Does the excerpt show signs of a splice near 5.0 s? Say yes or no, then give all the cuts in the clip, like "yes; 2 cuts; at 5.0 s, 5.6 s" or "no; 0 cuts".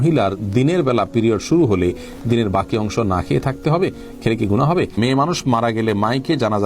yes; 1 cut; at 5.0 s